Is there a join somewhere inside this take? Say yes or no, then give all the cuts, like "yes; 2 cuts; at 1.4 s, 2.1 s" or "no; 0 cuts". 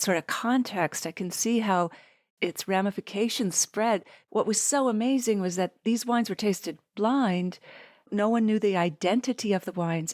yes; 1 cut; at 4.1 s